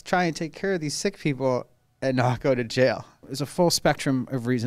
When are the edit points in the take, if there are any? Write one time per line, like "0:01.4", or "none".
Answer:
0:03.2